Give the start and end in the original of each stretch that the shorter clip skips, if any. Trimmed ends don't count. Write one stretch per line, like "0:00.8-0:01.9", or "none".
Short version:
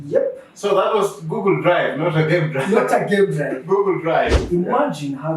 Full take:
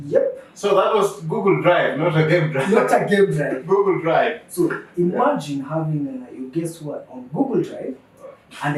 0:04.4-0:04.9